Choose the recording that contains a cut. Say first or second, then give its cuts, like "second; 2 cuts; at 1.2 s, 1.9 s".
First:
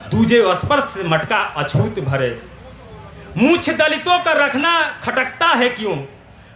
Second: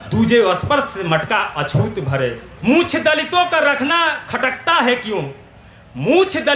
second; 1 cut; at 2.5 s